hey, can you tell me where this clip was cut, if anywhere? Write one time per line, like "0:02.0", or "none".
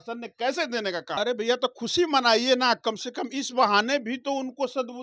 0:01.2

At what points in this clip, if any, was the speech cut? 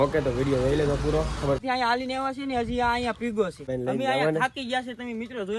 0:01.6
0:03.7

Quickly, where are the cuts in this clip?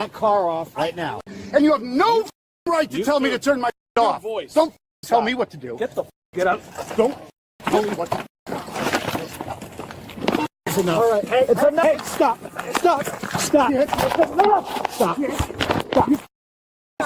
0:01.1

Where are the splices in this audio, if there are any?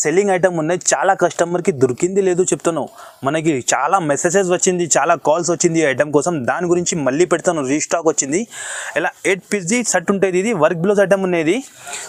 none

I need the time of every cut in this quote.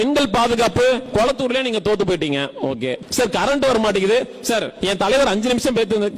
0:01.0
0:03.0
0:04.7

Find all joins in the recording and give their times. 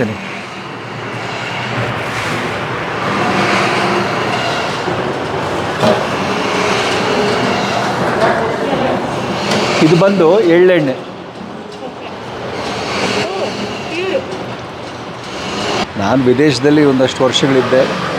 0:15.8

